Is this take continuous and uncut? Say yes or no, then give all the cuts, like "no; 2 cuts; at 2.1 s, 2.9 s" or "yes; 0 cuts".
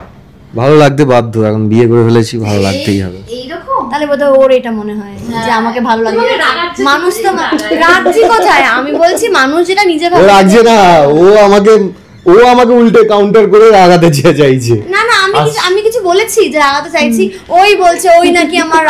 yes; 0 cuts